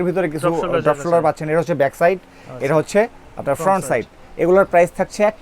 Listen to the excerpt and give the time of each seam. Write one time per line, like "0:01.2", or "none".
none